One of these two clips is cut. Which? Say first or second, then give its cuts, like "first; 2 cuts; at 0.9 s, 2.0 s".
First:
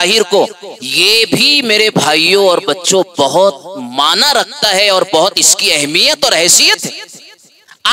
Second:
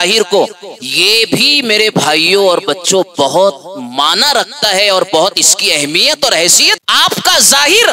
second; 1 cut; at 6.8 s